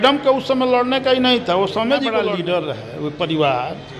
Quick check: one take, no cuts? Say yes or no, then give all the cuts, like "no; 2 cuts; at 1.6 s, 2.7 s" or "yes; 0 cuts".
no; 1 cut; at 2.3 s